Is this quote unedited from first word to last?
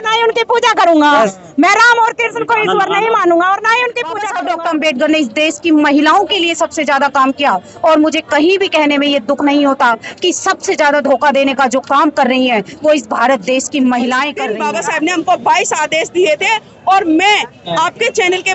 no; 2 cuts; at 4.3 s, 14.4 s

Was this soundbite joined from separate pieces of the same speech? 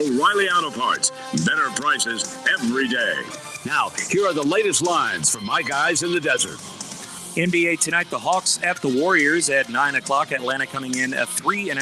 yes; 1 cut; at 7.2 s

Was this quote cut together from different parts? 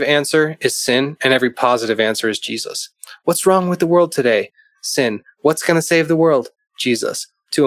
no; 0 cuts

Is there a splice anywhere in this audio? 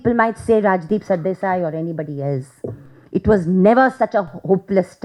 no; 0 cuts

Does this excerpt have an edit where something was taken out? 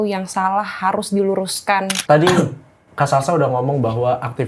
yes; 1 cut; at 1.9 s

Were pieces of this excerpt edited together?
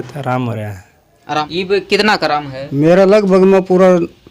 yes; 1 cut; at 1.4 s

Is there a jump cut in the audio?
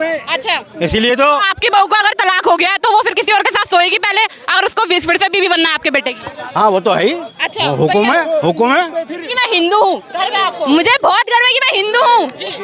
yes; 1 cut; at 9.3 s

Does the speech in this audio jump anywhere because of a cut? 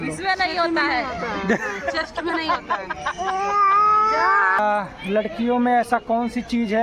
yes; 1 cut; at 4.6 s

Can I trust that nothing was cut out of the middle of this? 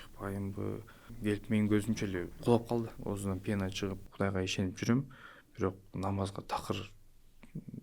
no; 3 cuts; at 1.0 s, 3.0 s, 4.1 s

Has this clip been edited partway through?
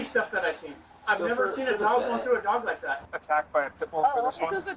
yes; 2 cuts; at 3.0 s, 4.0 s

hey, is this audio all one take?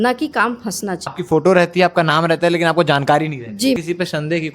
no; 2 cuts; at 1.1 s, 3.8 s

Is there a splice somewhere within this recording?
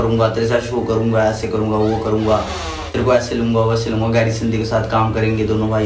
no; 0 cuts

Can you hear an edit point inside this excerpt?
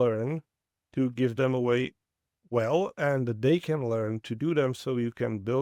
no; 0 cuts

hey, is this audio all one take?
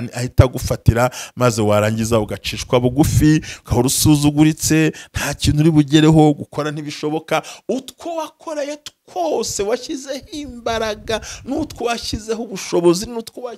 yes; 0 cuts

